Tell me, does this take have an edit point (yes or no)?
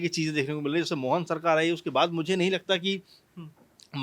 no